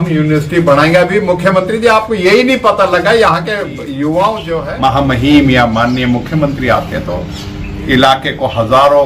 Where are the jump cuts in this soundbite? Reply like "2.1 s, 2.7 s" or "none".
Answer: 4.7 s